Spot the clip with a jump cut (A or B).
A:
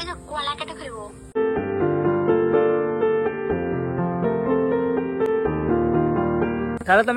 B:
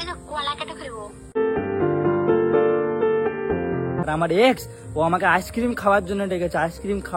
B